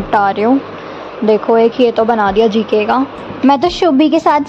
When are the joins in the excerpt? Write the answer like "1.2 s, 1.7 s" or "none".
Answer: 3.2 s